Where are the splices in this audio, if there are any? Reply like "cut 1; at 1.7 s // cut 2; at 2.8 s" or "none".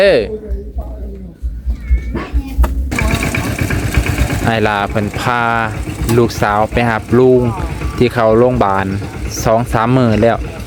cut 1; at 2.9 s